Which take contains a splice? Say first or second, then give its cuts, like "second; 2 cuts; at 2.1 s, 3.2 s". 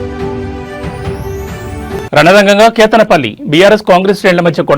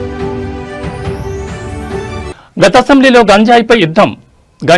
second; 1 cut; at 2.0 s